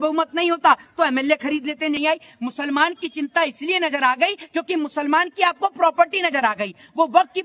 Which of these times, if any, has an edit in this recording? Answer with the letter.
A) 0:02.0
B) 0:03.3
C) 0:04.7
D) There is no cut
A